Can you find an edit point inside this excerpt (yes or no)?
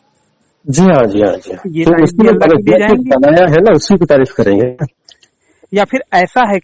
no